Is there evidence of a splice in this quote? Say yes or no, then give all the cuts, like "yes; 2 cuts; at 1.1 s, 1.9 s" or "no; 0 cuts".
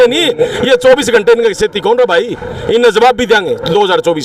no; 0 cuts